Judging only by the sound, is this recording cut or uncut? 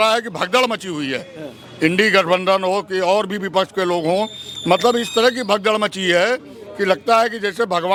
uncut